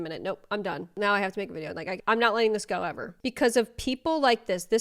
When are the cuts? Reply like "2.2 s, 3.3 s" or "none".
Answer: 1.0 s, 2.0 s, 3.2 s